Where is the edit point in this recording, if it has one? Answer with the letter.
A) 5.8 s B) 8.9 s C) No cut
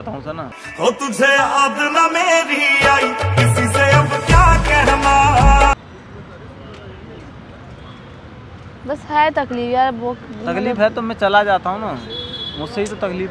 C